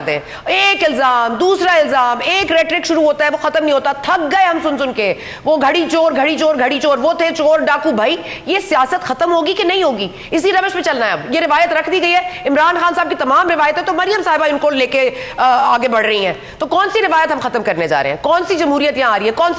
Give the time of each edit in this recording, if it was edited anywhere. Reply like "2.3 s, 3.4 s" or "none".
none